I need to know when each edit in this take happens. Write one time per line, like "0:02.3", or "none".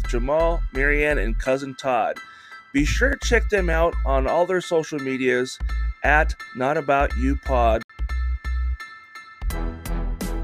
0:07.8